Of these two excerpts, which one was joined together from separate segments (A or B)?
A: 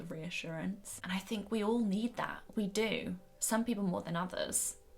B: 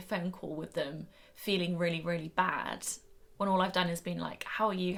A